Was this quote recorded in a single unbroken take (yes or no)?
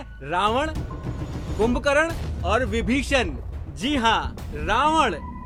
yes